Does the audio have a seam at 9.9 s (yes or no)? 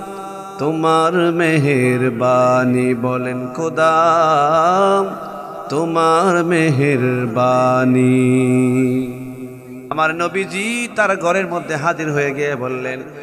yes